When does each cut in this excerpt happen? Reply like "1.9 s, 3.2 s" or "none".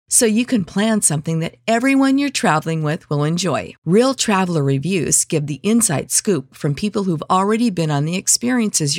none